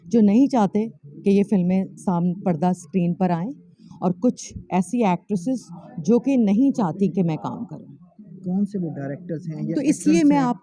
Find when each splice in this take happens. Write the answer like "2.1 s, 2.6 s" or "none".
none